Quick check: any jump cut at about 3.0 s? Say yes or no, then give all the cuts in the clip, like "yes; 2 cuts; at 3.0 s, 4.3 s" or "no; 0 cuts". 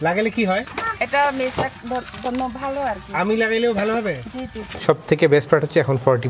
no; 1 cut; at 4.7 s